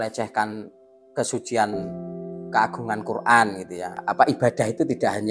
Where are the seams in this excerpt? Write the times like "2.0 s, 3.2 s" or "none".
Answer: 4.0 s